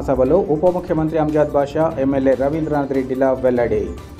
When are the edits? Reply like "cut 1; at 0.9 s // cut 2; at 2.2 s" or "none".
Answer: none